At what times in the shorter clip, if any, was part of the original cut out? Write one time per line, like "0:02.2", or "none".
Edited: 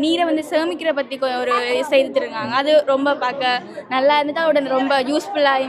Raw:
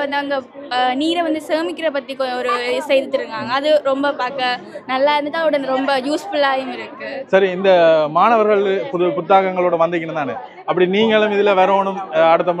none